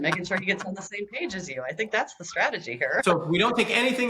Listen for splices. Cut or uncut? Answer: cut